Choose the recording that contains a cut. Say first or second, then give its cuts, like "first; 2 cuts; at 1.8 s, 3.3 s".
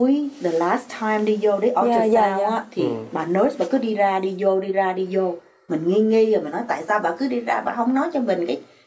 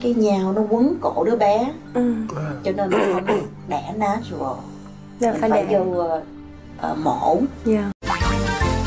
second; 1 cut; at 8.0 s